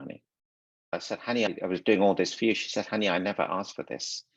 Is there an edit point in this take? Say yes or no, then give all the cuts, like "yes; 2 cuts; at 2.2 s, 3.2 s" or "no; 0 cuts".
yes; 1 cut; at 1.0 s